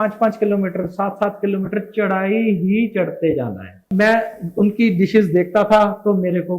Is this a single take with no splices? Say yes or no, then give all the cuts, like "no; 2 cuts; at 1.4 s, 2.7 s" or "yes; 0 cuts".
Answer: no; 1 cut; at 3.9 s